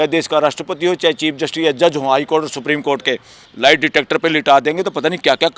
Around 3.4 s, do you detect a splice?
yes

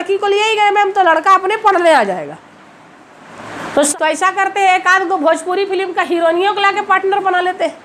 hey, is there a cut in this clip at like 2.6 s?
no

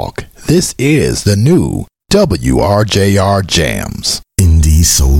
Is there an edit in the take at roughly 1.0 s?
no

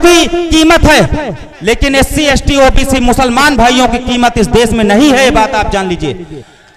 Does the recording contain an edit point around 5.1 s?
no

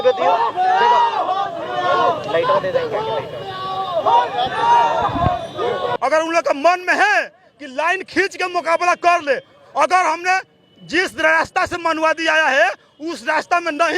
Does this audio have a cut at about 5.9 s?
yes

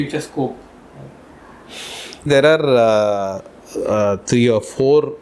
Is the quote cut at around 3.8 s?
no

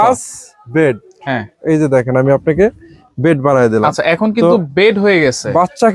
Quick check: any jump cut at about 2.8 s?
no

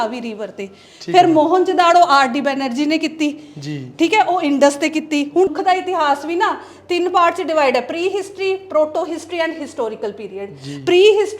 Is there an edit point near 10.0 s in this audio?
no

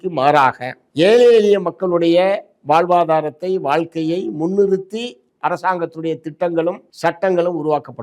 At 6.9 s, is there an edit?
yes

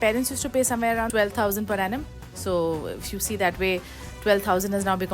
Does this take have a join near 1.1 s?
yes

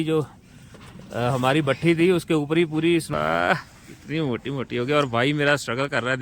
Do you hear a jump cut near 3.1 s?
yes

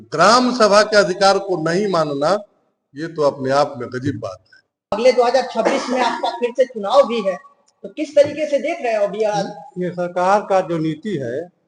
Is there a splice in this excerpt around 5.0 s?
yes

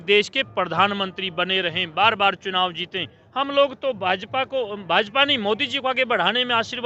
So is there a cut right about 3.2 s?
yes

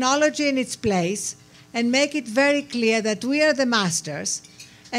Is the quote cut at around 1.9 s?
no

